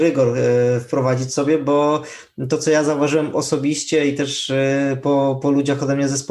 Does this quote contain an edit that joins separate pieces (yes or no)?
no